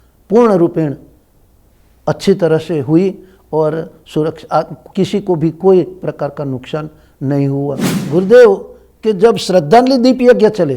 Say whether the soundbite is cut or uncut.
uncut